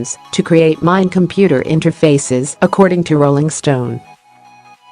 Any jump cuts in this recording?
yes; 1 cut; at 4.0 s

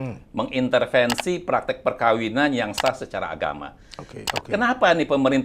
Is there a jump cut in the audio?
yes; 1 cut; at 4.1 s

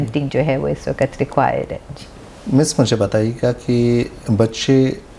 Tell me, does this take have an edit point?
no; 0 cuts

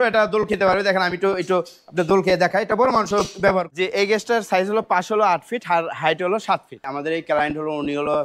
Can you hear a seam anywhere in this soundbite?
yes; 2 cuts; at 3.7 s, 6.8 s

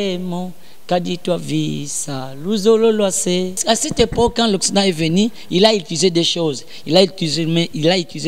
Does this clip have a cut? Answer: yes; 1 cut; at 3.6 s

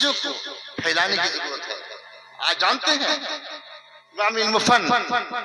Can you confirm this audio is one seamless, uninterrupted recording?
yes; 0 cuts

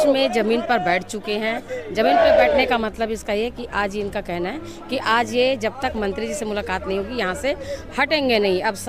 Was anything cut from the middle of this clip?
no; 0 cuts

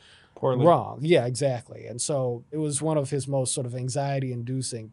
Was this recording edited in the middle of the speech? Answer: yes; 1 cut; at 2.5 s

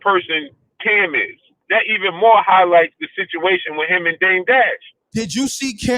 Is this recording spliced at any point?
yes; 2 cuts; at 1.6 s, 5.0 s

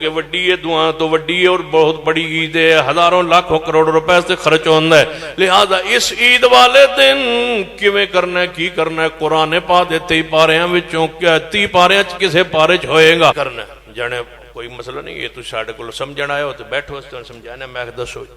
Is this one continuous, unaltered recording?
no; 1 cut; at 13.4 s

